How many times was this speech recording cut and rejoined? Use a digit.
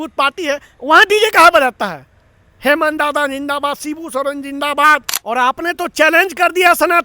1